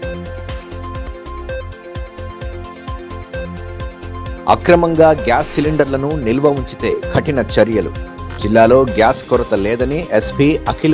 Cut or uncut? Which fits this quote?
cut